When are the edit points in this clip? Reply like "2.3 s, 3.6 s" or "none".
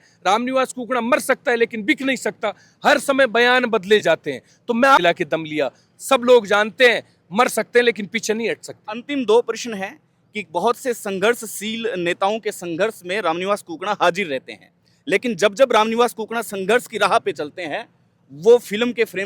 5.0 s

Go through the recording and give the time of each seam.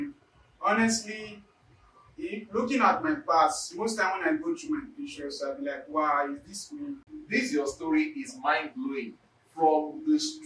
7.1 s

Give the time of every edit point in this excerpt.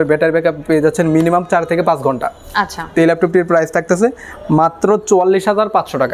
none

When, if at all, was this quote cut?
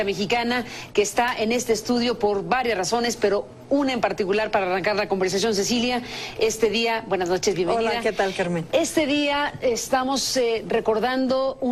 5.1 s

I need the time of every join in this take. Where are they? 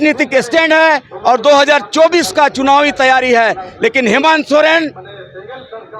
none

